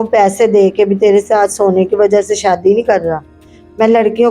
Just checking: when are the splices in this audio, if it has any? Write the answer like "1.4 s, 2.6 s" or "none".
none